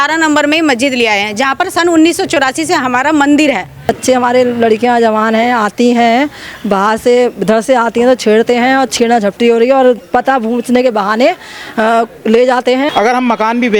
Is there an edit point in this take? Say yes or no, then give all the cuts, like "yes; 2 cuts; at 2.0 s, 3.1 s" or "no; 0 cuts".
yes; 2 cuts; at 3.9 s, 12.9 s